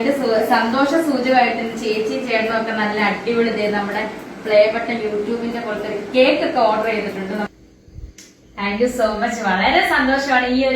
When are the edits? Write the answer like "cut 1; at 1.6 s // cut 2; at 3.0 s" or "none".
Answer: cut 1; at 7.5 s